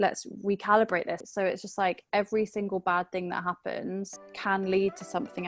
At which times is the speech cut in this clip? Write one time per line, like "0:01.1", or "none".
0:01.2
0:04.2